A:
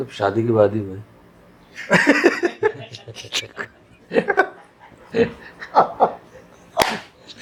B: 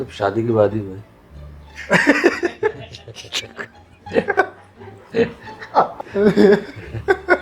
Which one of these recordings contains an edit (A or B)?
B